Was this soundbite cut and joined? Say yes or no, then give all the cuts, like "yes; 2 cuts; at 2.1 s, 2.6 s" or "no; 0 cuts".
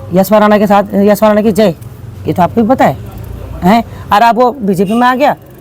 no; 0 cuts